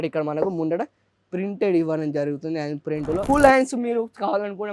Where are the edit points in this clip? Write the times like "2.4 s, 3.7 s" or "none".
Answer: 3.2 s